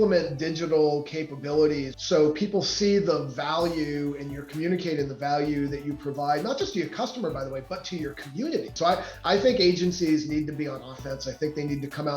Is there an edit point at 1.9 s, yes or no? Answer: yes